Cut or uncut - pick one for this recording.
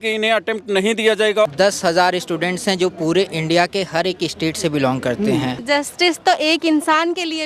cut